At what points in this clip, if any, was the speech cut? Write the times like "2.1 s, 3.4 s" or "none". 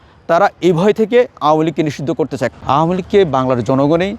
2.5 s